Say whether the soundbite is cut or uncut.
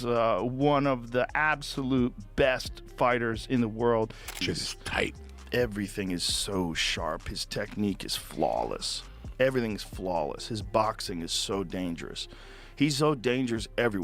cut